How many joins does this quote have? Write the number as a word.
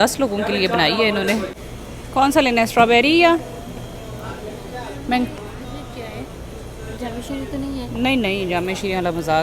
one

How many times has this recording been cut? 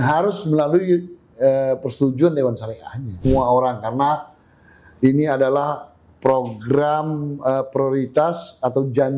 one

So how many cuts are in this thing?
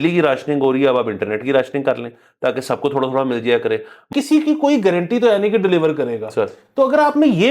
one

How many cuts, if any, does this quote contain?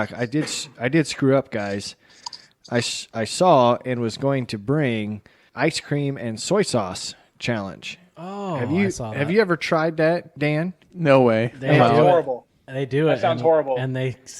two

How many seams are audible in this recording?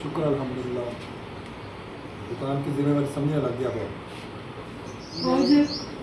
one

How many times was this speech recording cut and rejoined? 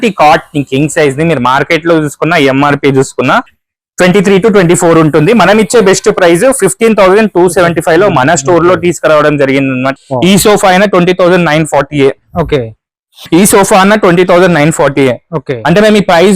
one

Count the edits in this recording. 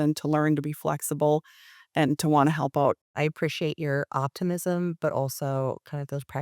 one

